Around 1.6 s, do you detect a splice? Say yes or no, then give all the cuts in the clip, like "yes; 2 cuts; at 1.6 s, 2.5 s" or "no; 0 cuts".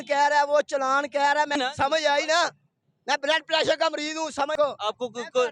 yes; 2 cuts; at 1.6 s, 4.6 s